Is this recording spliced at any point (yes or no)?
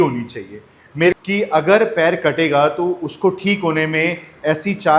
yes